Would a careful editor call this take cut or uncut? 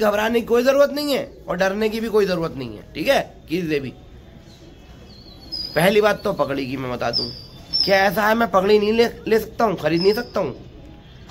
uncut